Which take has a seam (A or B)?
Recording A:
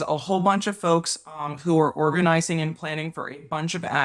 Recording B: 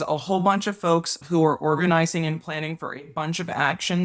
B